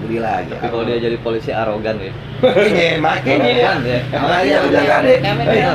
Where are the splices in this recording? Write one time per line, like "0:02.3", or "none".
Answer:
none